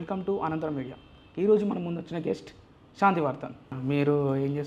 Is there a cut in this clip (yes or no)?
yes